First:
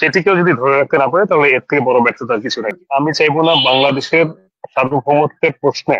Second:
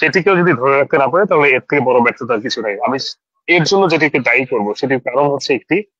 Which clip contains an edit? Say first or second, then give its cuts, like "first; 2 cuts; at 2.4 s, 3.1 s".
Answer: first; 1 cut; at 2.7 s